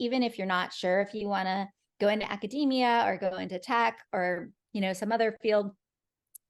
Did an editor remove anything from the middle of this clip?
no; 0 cuts

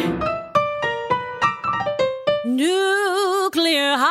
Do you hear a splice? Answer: no; 0 cuts

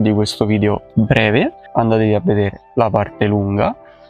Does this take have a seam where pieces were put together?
yes; 1 cut; at 1.2 s

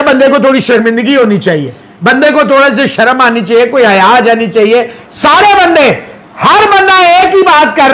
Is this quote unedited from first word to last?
yes; 0 cuts

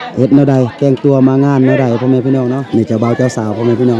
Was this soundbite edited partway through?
yes; 1 cut; at 2.5 s

